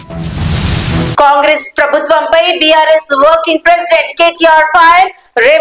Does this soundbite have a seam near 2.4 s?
no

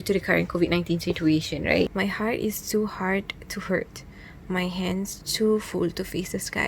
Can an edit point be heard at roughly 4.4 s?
no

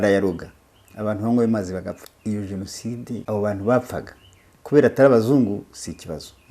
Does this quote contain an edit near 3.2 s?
yes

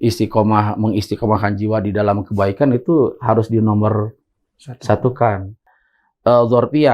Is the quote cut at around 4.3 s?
no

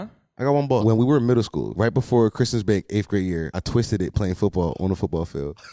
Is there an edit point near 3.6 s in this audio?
yes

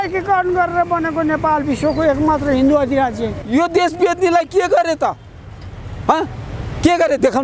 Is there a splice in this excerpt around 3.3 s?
yes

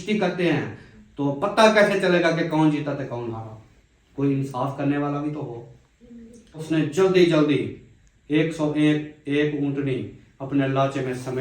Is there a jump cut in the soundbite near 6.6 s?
yes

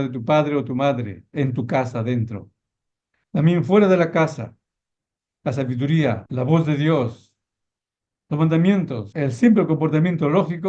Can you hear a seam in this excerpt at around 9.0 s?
yes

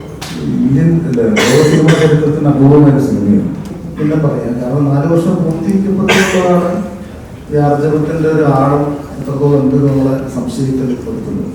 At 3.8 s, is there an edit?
yes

